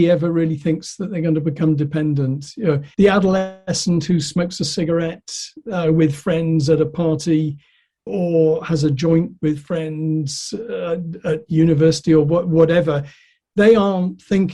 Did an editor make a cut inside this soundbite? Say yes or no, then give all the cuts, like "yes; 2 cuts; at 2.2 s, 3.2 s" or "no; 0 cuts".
yes; 1 cut; at 2.9 s